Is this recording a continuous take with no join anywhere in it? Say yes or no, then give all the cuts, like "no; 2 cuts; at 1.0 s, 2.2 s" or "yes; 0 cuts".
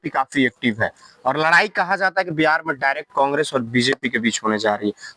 yes; 0 cuts